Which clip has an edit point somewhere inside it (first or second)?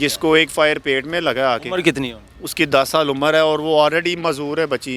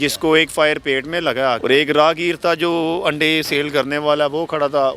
second